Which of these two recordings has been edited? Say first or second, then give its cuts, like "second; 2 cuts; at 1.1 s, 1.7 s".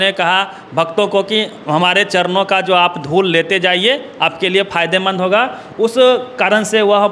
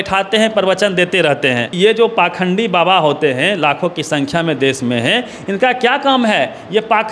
second; 1 cut; at 1.7 s